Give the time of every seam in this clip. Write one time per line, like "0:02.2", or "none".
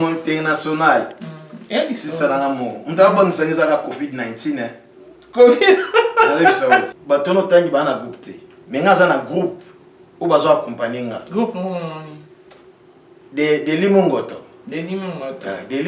0:06.9